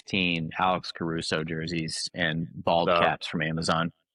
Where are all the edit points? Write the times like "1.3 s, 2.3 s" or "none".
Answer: none